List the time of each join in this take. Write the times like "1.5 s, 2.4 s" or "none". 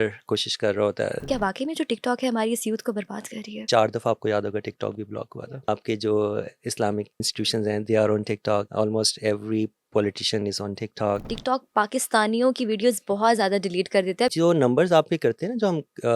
1.3 s, 3.7 s, 5.3 s, 7.2 s, 8.7 s, 11.3 s, 14.3 s